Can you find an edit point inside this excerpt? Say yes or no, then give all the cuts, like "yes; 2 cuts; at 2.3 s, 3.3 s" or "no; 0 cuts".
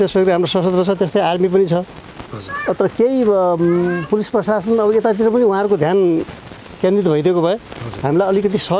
no; 0 cuts